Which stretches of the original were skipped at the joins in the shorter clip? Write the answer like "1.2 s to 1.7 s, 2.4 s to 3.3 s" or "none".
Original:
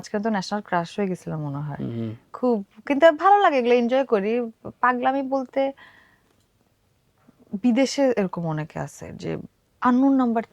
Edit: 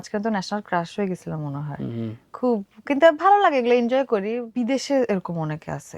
4.5 s to 7.5 s